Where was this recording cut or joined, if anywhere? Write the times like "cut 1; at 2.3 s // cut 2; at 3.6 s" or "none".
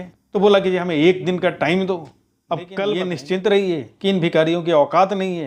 cut 1; at 3.1 s